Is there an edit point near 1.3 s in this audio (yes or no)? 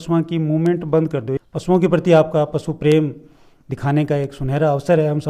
yes